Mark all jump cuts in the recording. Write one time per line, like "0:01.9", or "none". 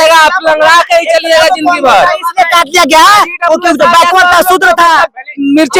none